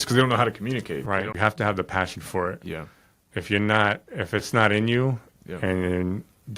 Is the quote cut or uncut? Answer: cut